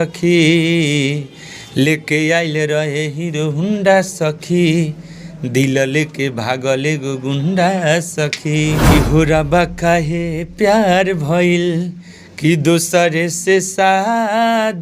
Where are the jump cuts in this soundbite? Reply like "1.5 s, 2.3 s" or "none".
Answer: 8.9 s